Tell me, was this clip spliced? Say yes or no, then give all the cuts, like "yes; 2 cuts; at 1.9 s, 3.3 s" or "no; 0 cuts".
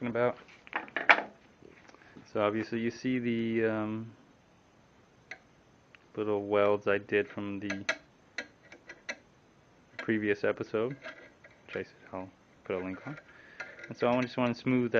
yes; 1 cut; at 12.3 s